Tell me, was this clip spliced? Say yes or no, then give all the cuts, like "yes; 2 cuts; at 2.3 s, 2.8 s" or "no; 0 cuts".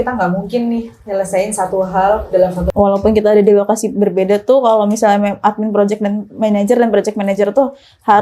yes; 1 cut; at 2.6 s